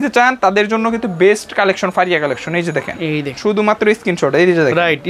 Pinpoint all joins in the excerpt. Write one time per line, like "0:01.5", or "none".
0:03.4

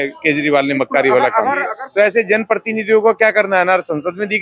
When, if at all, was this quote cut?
0:01.8

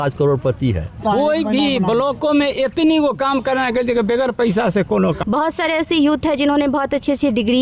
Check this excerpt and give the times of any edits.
0:01.0
0:05.2

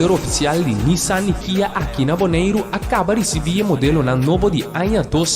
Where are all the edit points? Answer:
0:03.8

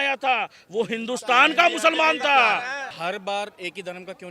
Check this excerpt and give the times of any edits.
0:02.9

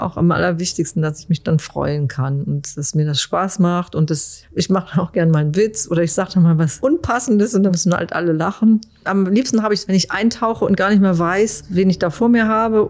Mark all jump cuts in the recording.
0:04.4
0:07.7
0:11.6

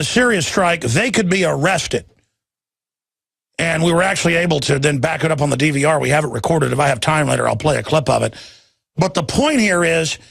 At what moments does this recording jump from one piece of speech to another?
0:06.2

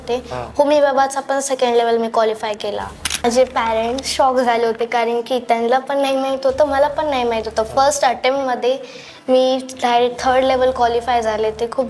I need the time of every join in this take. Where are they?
0:03.2

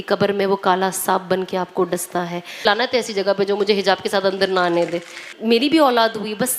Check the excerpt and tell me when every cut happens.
0:02.6
0:05.2

